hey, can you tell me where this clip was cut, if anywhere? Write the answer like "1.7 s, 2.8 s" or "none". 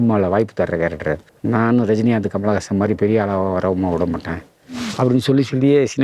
1.3 s